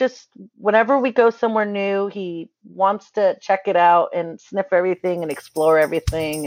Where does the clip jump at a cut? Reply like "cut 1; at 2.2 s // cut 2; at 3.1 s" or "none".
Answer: none